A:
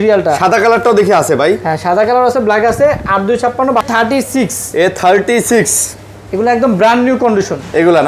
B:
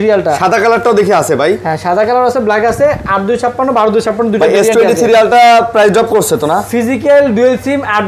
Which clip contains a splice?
A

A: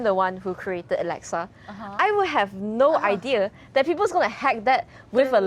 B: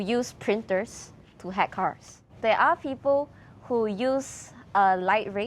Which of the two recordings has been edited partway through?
B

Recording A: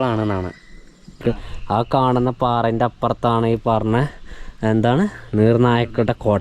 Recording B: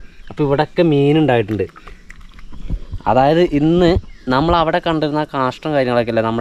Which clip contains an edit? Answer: A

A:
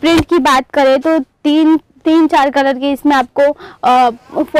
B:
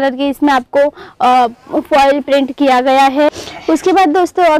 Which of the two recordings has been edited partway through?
B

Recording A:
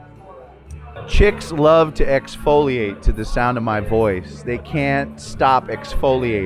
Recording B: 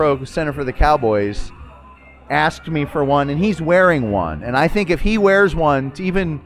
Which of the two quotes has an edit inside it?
A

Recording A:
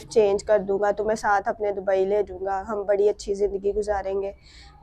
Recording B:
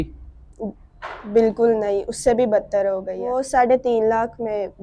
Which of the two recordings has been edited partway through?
B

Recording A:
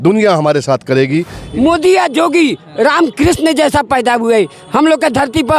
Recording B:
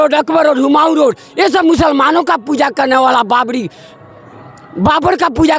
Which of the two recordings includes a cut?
A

